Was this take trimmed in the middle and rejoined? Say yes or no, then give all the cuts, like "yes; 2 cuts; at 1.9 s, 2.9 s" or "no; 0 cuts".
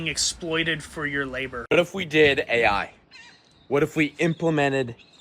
yes; 1 cut; at 1.6 s